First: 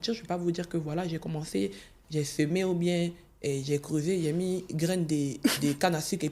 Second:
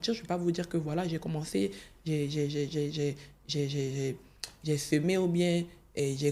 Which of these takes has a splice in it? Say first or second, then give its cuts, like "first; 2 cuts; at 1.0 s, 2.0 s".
first; 1 cut; at 1.9 s